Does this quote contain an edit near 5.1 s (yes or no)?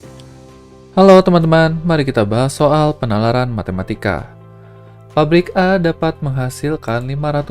no